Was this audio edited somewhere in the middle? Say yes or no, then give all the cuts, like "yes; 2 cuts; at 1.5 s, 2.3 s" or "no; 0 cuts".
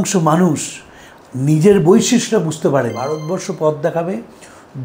yes; 1 cut; at 3.2 s